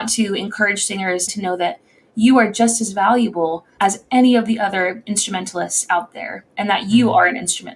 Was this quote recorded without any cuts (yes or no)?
no